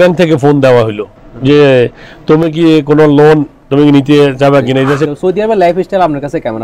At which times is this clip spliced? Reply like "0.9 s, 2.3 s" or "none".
5.1 s